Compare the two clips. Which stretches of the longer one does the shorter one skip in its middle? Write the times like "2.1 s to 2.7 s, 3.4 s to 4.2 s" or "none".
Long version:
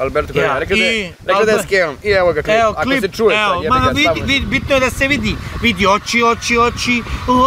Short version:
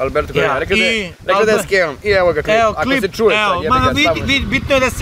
none